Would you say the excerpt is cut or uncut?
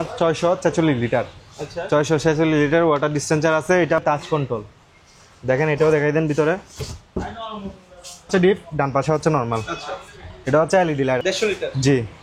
cut